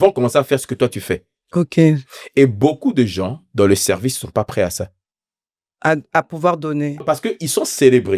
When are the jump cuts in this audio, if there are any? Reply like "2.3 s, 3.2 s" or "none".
7.0 s